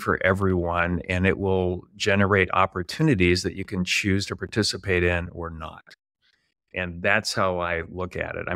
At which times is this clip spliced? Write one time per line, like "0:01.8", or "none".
none